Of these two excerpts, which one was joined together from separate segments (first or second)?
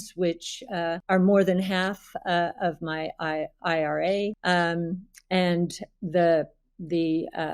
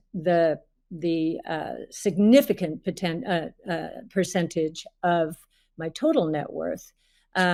first